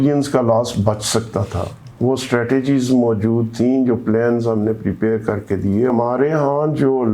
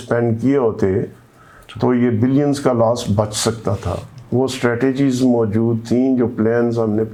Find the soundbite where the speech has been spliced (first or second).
first